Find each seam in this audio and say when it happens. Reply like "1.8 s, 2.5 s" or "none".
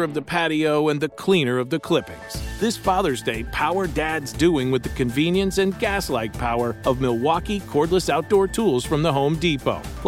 none